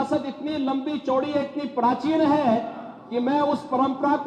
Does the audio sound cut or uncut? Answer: uncut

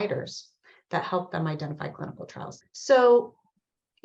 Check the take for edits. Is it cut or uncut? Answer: cut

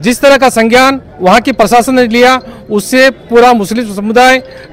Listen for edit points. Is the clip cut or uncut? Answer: uncut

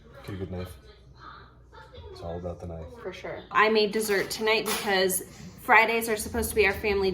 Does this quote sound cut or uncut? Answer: cut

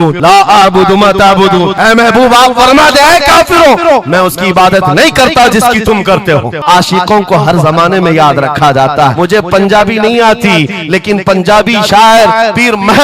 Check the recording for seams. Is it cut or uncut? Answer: cut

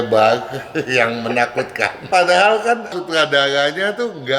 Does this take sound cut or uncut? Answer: cut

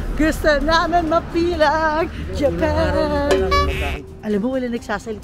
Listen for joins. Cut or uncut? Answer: cut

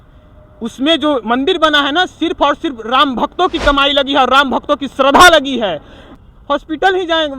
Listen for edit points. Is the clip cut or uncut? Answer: cut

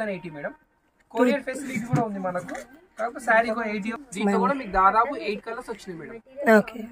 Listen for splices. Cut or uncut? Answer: cut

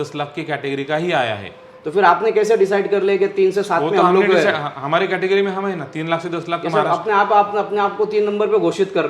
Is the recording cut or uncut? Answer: uncut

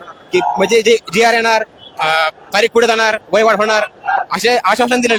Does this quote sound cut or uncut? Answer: uncut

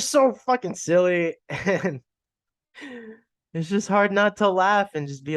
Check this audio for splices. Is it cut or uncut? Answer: uncut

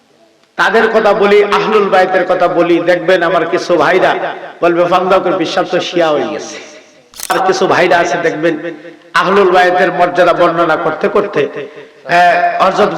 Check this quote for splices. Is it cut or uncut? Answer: cut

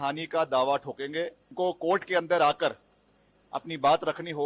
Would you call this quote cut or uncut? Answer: cut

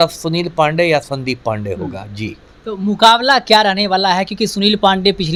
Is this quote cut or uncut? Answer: uncut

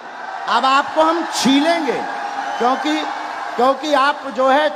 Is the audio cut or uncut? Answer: uncut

